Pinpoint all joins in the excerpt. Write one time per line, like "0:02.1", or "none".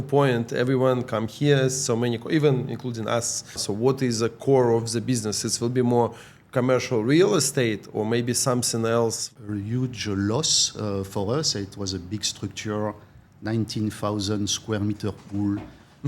0:03.7
0:09.2